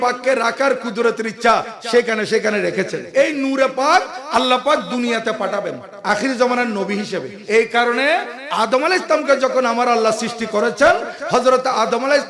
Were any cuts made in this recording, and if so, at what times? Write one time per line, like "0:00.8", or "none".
0:03.0
0:07.4